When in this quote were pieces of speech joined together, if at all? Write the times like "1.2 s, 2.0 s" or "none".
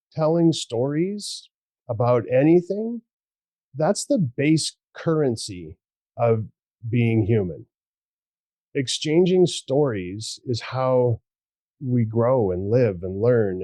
none